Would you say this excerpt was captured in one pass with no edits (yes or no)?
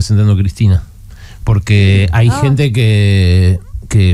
yes